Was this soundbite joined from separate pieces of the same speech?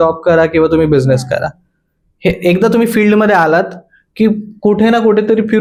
no; 0 cuts

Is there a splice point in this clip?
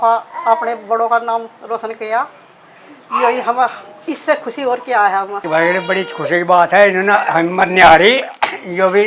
no; 0 cuts

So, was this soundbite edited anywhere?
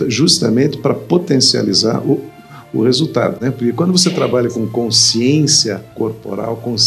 yes; 1 cut; at 3.4 s

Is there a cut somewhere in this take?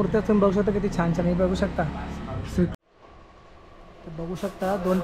yes; 1 cut; at 2.7 s

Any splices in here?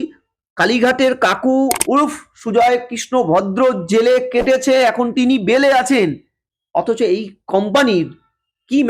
no; 0 cuts

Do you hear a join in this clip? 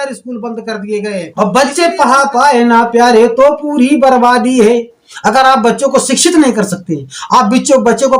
yes; 1 cut; at 1.3 s

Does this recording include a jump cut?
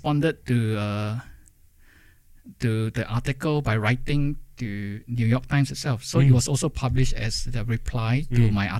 no; 0 cuts

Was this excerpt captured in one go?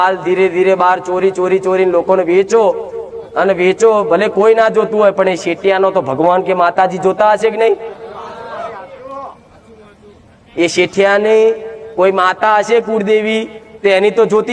yes; 0 cuts

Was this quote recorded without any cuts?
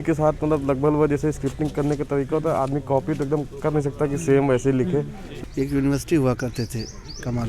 no; 1 cut; at 5.2 s

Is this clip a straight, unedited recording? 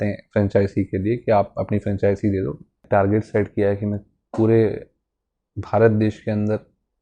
no; 1 cut; at 2.8 s

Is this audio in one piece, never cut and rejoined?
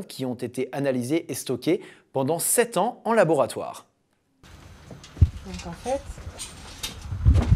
no; 1 cut; at 3.6 s

